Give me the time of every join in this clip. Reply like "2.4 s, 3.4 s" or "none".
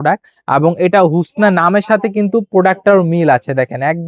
none